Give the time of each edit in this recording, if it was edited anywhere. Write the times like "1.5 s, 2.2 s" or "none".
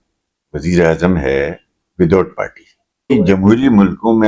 3.1 s